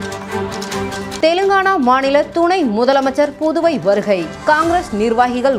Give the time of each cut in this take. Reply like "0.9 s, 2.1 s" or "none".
0.9 s

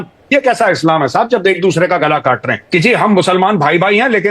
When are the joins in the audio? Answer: 2.6 s

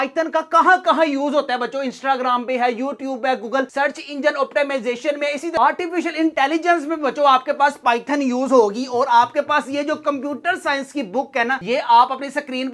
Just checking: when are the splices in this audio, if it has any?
none

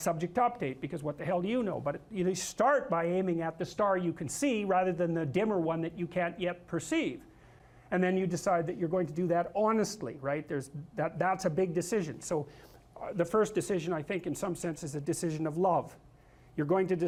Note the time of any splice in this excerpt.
none

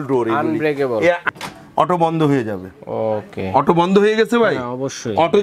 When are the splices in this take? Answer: 1.3 s

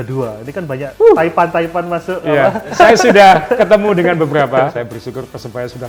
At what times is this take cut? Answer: 0.9 s, 2.7 s, 4.7 s

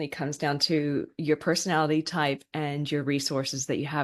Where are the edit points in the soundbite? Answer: none

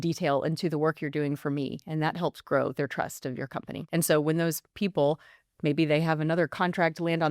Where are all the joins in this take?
3.8 s

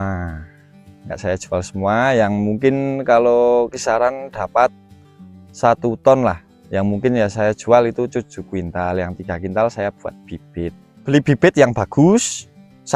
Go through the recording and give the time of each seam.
10.9 s

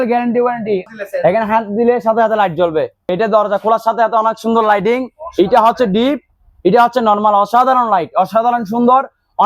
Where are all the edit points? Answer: 0.9 s, 3.1 s

